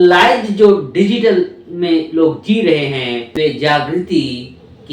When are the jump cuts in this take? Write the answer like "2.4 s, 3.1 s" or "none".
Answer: 3.3 s